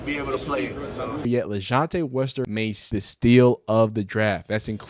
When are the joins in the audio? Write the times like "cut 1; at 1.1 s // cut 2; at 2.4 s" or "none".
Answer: cut 1; at 1.2 s // cut 2; at 2.9 s